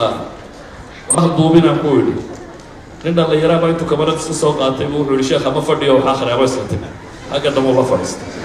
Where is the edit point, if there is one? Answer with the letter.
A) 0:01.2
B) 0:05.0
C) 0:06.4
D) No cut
A